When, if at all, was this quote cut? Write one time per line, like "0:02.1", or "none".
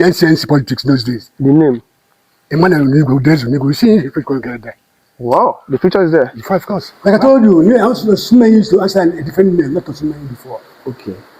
0:06.8